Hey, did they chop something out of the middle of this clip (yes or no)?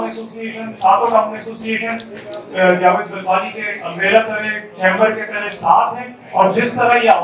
no